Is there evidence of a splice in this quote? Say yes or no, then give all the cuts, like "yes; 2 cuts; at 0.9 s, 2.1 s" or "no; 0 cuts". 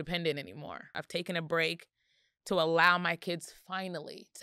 yes; 1 cut; at 1.0 s